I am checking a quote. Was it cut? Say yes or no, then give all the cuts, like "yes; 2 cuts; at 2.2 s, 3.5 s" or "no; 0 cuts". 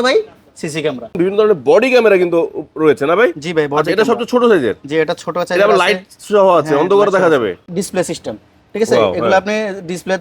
yes; 2 cuts; at 1.2 s, 7.6 s